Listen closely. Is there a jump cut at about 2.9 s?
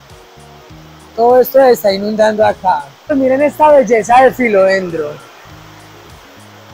yes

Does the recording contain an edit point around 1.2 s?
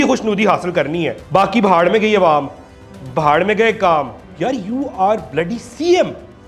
yes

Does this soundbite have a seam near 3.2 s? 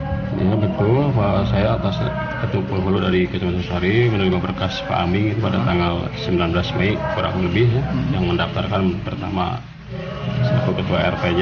no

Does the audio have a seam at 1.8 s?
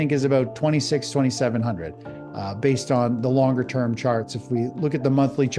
no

